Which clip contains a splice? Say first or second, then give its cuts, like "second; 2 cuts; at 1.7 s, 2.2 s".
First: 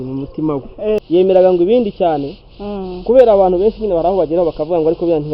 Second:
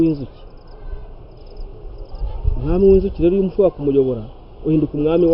first; 1 cut; at 1.0 s